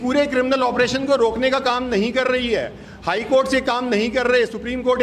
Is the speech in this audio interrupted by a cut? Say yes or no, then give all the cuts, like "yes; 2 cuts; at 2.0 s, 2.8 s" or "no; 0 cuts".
no; 0 cuts